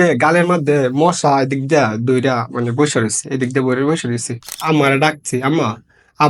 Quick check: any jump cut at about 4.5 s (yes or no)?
yes